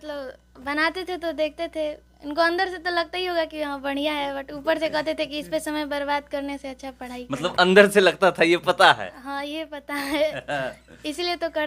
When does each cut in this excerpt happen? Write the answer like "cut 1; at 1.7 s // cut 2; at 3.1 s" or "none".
none